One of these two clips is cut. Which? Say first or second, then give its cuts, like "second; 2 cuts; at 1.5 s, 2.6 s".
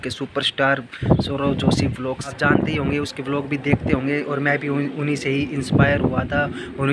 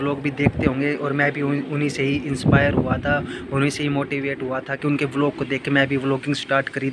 first; 1 cut; at 2.3 s